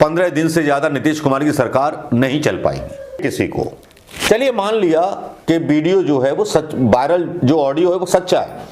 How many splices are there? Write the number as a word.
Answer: one